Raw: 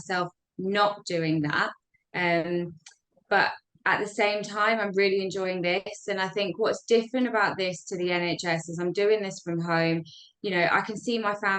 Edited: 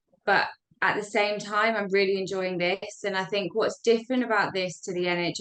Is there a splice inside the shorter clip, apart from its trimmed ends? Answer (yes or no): no